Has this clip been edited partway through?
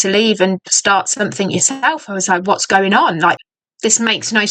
yes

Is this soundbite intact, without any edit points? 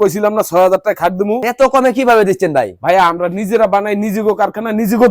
no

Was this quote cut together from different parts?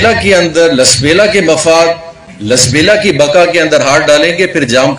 no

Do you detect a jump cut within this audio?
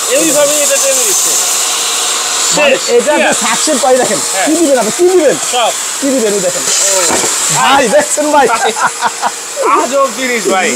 no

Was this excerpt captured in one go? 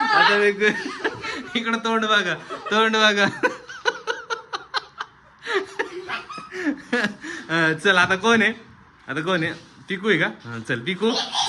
yes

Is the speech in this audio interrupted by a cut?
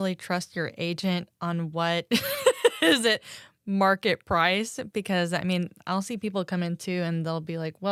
no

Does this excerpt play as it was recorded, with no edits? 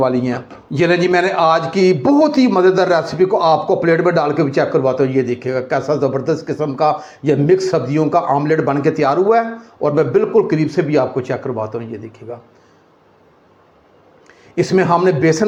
yes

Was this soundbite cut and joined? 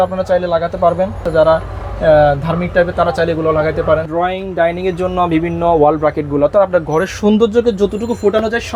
yes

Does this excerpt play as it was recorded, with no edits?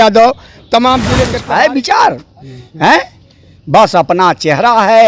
no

